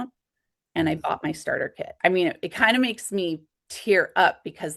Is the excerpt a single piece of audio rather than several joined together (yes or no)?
yes